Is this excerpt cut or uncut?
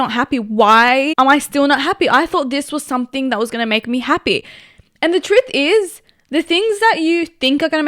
cut